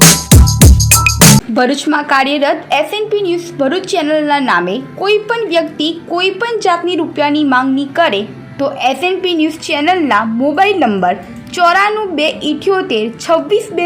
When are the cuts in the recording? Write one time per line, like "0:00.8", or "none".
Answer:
0:01.4

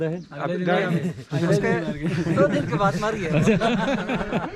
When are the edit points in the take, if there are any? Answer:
none

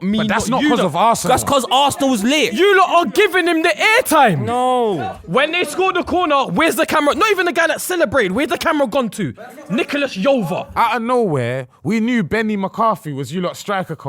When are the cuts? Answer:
0:01.2
0:02.6
0:04.9
0:10.6

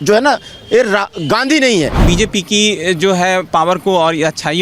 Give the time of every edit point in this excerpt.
0:02.0

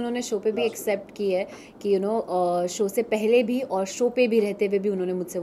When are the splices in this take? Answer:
none

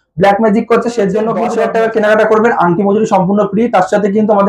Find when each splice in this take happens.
0:01.5

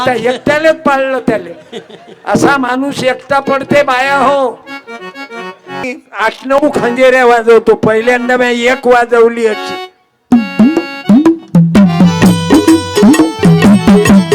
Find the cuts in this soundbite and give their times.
0:06.0

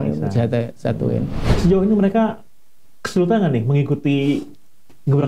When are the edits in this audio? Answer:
0:01.4

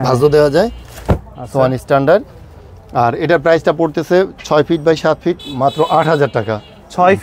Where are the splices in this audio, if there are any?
none

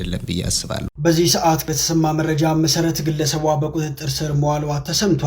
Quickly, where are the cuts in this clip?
0:00.9

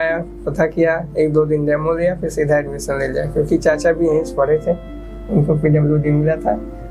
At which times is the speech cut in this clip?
none

